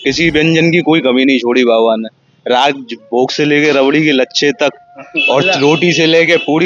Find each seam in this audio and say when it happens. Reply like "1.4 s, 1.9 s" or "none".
none